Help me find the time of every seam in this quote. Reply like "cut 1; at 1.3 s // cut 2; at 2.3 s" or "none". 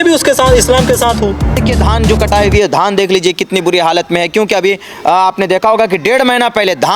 cut 1; at 1.6 s